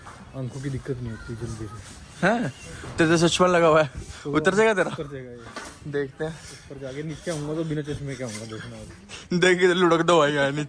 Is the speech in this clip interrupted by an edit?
no; 0 cuts

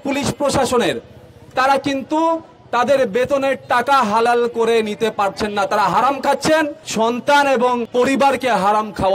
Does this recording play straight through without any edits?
no; 2 cuts; at 6.8 s, 7.9 s

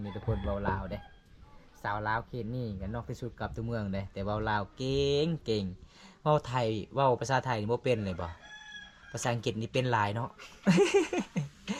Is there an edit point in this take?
no; 0 cuts

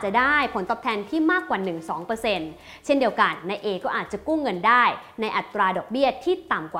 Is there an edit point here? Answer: no; 0 cuts

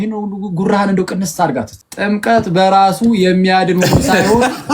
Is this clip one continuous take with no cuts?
no; 1 cut; at 1.8 s

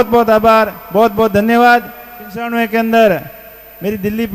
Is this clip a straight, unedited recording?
no; 1 cut; at 2.5 s

